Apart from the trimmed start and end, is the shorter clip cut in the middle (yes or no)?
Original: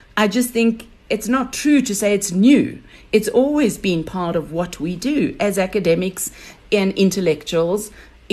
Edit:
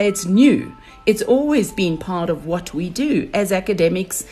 no